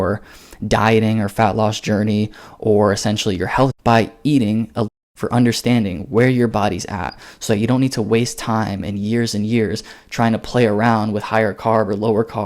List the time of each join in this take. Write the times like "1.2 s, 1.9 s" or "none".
3.8 s, 4.9 s